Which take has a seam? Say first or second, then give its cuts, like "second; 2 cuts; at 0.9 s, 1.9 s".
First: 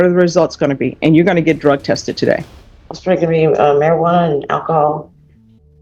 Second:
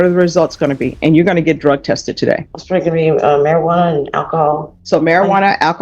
second; 2 cuts; at 2.5 s, 4.7 s